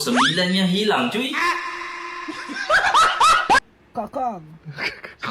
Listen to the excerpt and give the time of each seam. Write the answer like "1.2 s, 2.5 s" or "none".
3.6 s